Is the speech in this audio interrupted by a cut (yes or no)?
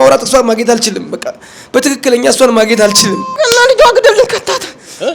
yes